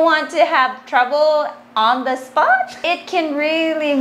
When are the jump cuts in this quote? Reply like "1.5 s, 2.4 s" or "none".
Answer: 2.8 s